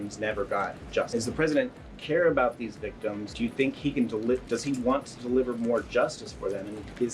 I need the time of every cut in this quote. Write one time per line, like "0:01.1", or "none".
0:01.1
0:03.3